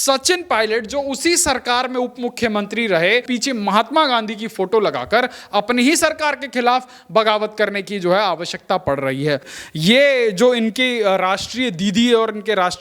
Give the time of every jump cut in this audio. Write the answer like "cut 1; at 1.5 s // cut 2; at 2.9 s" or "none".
cut 1; at 3.3 s // cut 2; at 9.5 s

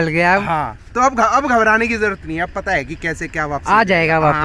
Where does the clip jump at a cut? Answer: none

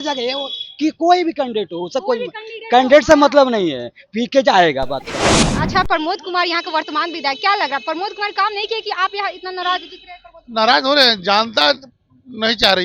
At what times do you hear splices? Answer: cut 1; at 5.4 s

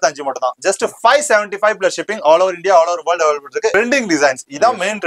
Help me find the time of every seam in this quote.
cut 1; at 3.7 s

